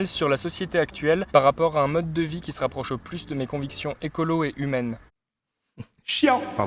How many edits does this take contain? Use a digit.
1